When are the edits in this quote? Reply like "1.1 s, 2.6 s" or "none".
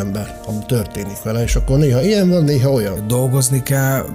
3.0 s